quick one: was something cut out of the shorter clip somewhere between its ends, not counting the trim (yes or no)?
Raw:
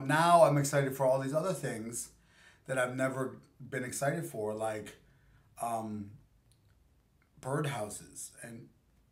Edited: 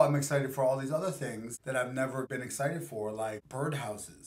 yes